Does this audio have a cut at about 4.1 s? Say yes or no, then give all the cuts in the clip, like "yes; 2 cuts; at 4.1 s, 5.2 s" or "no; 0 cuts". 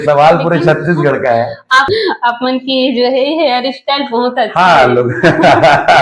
no; 1 cut; at 1.9 s